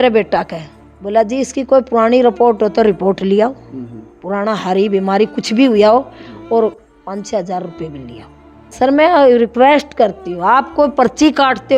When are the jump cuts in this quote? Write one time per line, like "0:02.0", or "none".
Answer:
0:08.7